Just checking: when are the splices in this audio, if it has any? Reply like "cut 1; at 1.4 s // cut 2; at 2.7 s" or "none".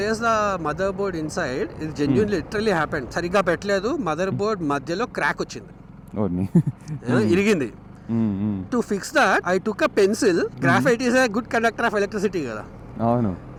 none